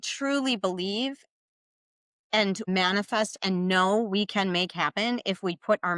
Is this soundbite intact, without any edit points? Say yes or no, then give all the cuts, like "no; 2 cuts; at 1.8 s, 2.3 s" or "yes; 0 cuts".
no; 1 cut; at 2.7 s